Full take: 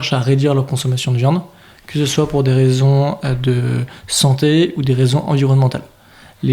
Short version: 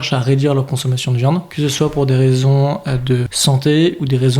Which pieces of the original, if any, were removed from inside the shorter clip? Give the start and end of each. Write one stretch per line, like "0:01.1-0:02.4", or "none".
0:01.5-0:01.9
0:03.7-0:04.1